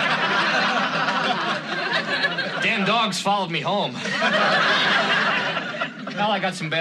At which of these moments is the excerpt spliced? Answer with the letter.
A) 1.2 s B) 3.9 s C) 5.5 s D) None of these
D